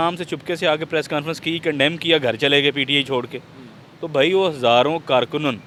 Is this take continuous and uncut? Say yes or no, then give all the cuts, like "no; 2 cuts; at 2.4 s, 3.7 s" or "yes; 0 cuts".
yes; 0 cuts